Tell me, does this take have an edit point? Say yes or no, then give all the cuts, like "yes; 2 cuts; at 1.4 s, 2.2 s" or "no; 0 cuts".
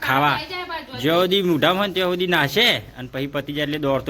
no; 0 cuts